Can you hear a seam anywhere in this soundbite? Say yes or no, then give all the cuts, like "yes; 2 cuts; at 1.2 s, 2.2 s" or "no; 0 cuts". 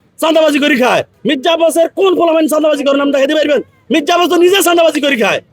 yes; 1 cut; at 1.1 s